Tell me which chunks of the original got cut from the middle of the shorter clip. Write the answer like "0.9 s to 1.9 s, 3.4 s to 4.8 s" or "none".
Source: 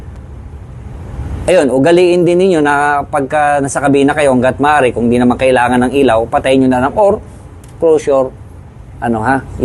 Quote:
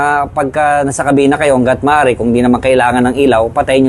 none